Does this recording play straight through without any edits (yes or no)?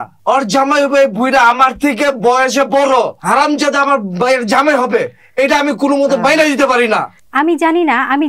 no